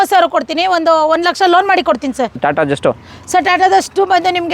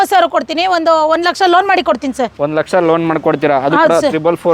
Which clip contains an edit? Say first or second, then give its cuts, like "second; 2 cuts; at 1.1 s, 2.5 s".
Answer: first; 1 cut; at 2.4 s